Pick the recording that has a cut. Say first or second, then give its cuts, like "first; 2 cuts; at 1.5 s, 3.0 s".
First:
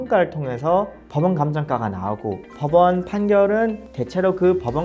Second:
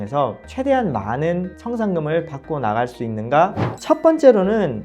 second; 1 cut; at 3.7 s